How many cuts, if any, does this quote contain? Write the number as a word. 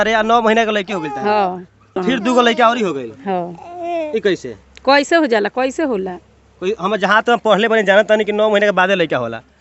one